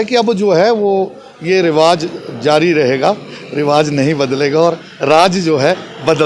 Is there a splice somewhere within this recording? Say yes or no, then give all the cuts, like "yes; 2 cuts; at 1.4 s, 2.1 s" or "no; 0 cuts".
no; 0 cuts